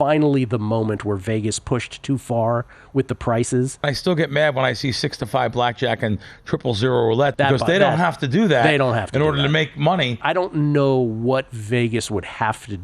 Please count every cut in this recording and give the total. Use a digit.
3